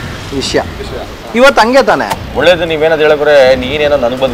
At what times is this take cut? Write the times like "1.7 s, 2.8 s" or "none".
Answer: 2.2 s